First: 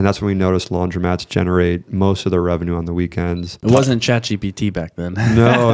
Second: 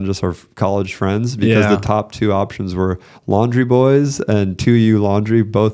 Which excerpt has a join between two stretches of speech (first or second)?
first